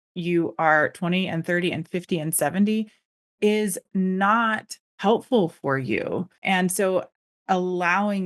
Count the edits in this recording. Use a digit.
1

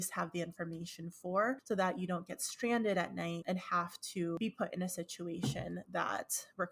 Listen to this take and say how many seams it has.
2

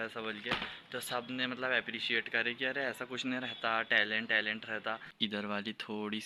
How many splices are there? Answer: 1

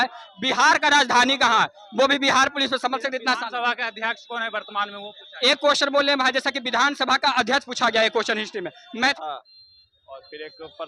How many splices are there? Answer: 1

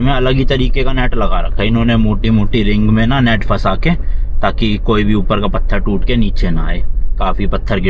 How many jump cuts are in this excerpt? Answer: 0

